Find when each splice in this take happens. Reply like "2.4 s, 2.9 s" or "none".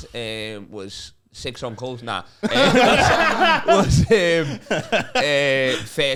none